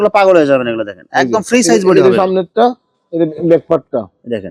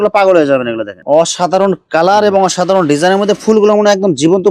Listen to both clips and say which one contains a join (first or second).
second